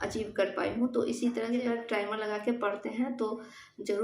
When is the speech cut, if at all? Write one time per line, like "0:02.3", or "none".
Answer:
0:01.6